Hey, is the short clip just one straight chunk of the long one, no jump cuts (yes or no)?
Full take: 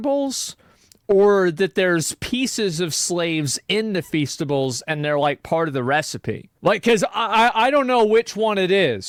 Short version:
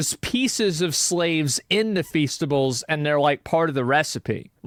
yes